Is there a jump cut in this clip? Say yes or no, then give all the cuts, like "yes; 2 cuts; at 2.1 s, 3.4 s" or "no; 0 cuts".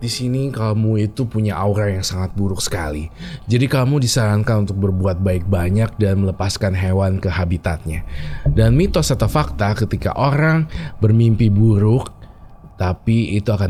no; 0 cuts